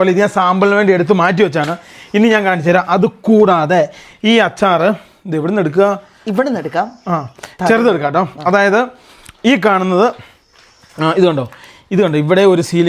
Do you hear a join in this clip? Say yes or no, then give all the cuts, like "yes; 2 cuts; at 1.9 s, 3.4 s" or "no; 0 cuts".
no; 0 cuts